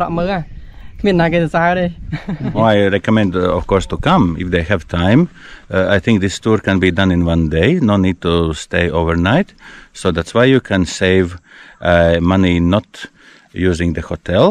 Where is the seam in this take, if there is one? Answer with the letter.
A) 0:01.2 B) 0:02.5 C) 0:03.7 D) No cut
B